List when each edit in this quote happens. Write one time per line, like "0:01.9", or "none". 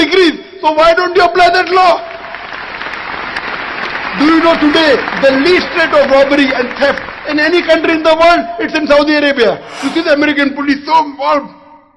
0:09.8

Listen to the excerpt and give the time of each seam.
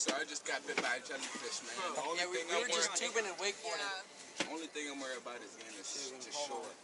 none

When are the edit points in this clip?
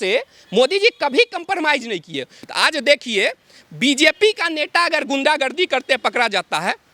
0:02.4

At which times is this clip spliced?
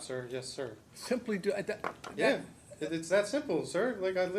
none

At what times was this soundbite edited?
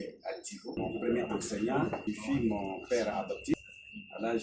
0:00.8
0:02.0
0:03.5

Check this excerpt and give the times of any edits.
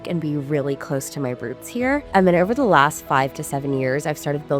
0:02.1

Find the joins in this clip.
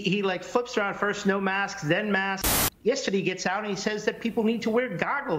0:02.4

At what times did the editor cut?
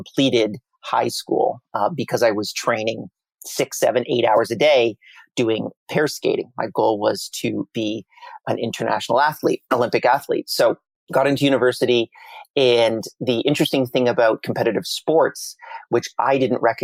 none

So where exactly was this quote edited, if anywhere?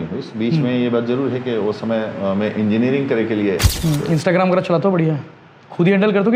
0:03.7

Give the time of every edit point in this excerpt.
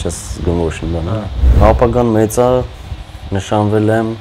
0:01.4

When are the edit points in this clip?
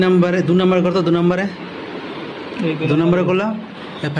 none

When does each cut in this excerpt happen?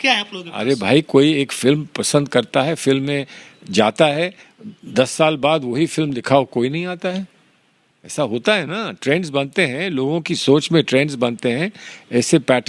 none

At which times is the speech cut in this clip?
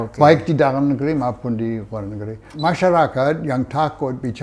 0:02.6

